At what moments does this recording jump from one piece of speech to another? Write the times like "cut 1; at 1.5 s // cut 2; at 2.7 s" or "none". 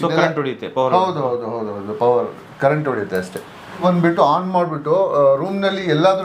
cut 1; at 3.8 s